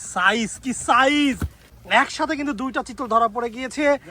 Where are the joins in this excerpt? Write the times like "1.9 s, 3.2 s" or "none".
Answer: 1.7 s